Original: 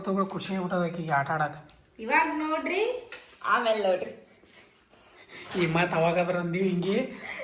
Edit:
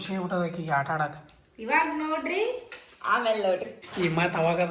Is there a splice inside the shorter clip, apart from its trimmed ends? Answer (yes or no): yes